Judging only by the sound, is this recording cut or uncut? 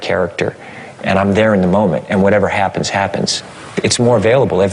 uncut